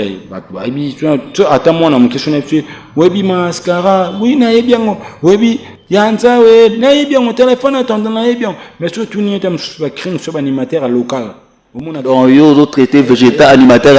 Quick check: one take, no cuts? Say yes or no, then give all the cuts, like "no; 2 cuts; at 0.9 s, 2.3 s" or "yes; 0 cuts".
yes; 0 cuts